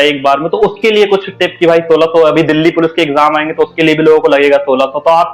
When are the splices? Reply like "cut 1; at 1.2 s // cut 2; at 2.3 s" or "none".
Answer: none

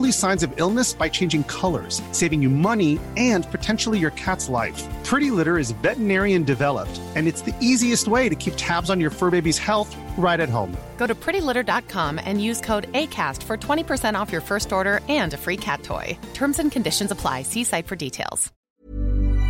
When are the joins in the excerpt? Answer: cut 1; at 18.5 s

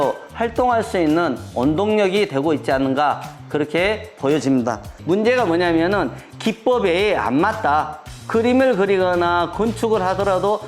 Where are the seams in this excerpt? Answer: cut 1; at 4.9 s

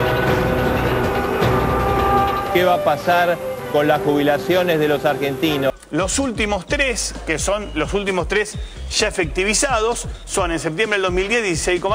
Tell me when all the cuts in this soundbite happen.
none

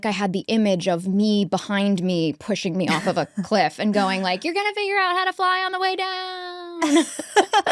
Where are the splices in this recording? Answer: none

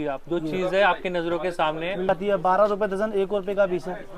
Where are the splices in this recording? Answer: cut 1; at 2.1 s

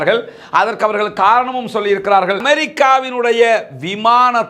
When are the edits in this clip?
cut 1; at 2.4 s

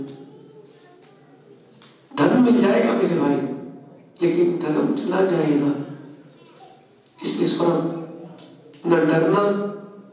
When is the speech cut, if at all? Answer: none

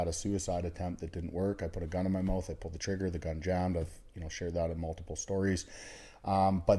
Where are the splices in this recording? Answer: none

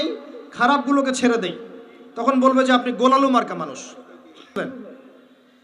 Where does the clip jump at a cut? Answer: cut 1; at 4.6 s

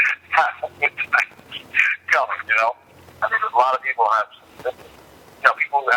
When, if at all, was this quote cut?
none

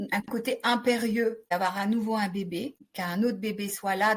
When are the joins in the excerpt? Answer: cut 1; at 1.4 s // cut 2; at 2.8 s

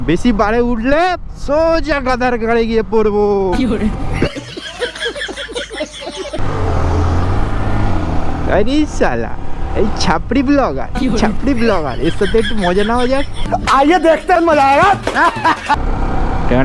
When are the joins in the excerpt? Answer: cut 1; at 6.4 s // cut 2; at 13.4 s // cut 3; at 15.7 s

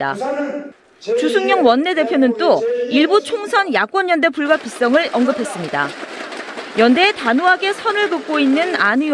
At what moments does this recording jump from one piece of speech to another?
none

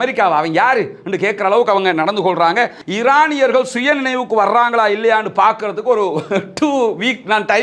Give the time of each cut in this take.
cut 1; at 2.8 s

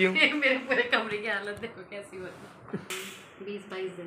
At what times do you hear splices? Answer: cut 1; at 2.9 s

